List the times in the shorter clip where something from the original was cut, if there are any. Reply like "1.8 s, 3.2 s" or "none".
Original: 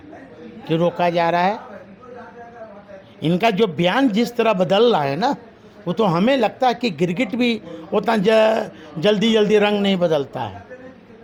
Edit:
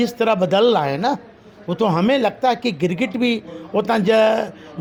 none